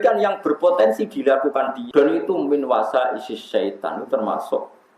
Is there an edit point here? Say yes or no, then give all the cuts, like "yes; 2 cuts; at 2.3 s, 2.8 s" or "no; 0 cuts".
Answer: yes; 1 cut; at 1.8 s